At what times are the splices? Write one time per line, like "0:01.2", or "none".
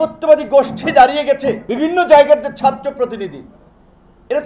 0:01.7